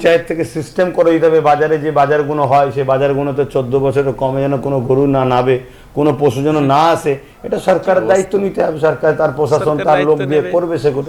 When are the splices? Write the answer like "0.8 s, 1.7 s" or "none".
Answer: none